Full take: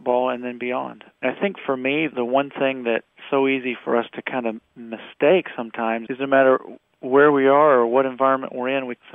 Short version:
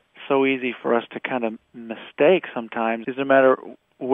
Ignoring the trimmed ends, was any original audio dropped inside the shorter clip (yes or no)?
no